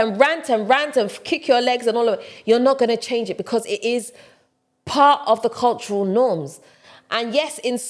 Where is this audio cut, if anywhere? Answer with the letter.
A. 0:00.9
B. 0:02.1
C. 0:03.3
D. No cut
D